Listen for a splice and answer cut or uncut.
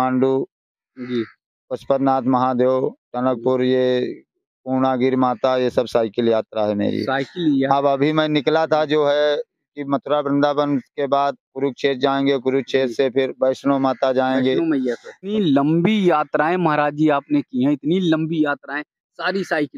uncut